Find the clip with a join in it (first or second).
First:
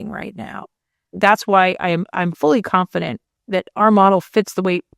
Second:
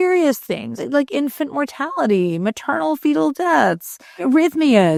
first